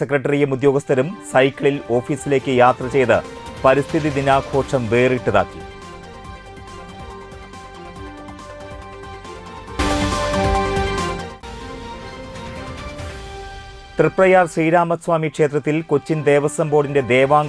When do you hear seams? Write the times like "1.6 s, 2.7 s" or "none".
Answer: none